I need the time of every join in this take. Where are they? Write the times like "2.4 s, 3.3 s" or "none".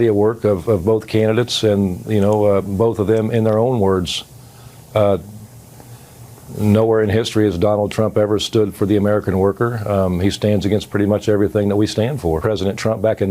12.4 s

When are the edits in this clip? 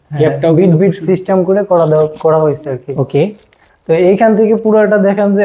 none

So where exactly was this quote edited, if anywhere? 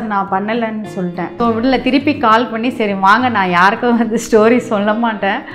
1.3 s

